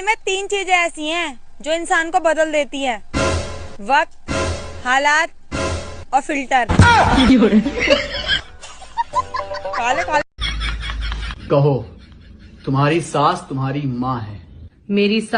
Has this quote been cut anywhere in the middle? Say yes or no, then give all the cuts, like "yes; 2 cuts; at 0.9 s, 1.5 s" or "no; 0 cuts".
yes; 1 cut; at 10.4 s